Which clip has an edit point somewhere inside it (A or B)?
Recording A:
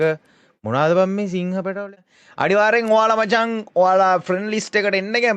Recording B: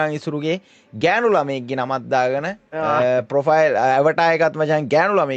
A